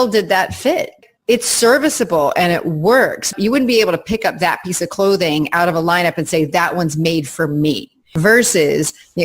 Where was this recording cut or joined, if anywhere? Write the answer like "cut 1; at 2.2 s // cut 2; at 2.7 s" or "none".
cut 1; at 1.0 s // cut 2; at 3.3 s // cut 3; at 8.1 s